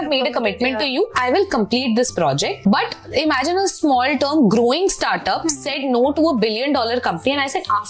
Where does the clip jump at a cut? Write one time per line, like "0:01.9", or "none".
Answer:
0:02.6